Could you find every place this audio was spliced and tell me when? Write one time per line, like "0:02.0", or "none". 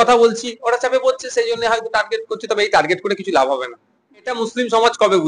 0:04.4